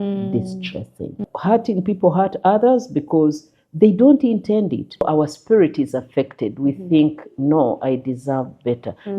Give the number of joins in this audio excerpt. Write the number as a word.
two